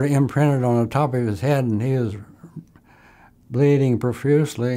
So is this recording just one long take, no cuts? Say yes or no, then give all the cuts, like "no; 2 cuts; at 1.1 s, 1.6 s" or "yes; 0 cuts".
yes; 0 cuts